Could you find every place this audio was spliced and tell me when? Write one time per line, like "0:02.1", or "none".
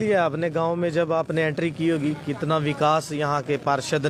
none